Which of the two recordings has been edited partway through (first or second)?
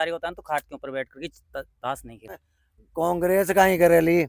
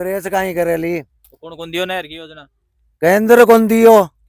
first